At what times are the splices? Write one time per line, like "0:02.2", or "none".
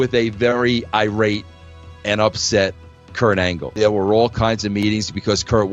0:03.6